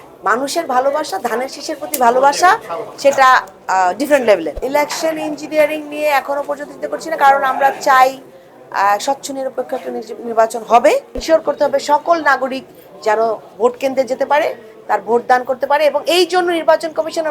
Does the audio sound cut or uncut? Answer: cut